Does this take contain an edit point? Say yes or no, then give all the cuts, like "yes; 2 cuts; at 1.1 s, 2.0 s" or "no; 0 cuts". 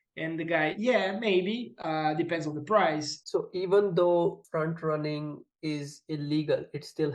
yes; 2 cuts; at 3.1 s, 4.4 s